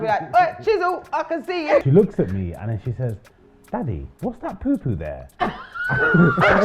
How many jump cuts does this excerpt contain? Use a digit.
1